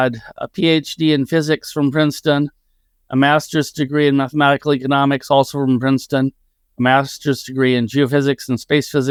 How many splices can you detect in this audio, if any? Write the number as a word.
zero